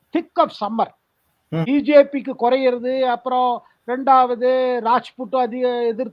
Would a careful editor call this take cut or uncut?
cut